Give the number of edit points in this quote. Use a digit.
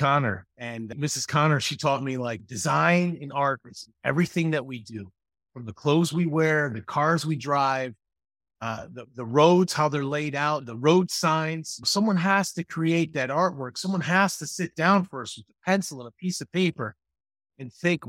1